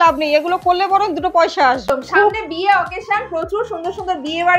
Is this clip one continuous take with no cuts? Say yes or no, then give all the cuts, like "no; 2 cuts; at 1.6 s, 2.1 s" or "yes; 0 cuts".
no; 1 cut; at 1.8 s